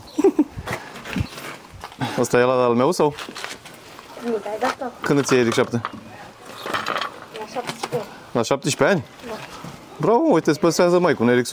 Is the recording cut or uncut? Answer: uncut